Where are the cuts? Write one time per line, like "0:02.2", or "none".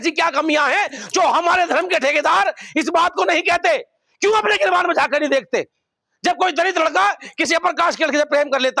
none

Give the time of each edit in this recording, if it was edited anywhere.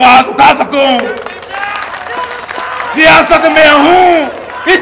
none

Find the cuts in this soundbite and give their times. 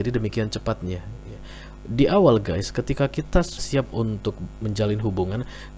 0:03.5

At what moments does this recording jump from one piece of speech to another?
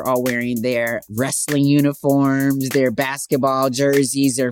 0:01.0

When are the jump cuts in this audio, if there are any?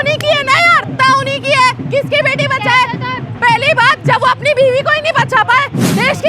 0:00.9

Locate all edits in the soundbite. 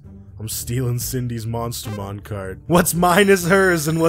0:02.5

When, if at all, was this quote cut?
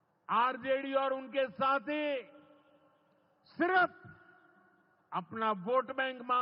none

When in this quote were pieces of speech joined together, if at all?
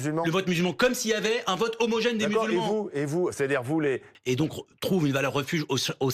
0:04.1

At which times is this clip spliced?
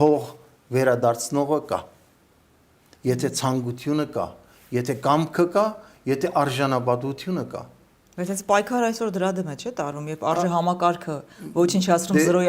none

